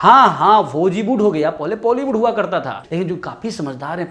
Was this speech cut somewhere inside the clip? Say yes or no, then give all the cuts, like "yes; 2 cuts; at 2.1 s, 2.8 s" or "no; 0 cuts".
yes; 1 cut; at 2.8 s